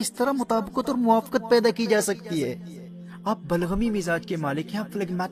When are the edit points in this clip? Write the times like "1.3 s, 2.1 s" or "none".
none